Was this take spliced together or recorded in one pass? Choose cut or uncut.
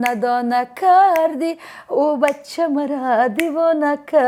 uncut